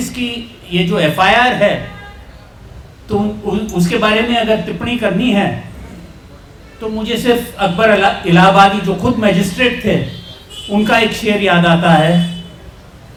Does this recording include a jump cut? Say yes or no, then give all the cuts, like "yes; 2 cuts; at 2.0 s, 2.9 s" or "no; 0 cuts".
no; 0 cuts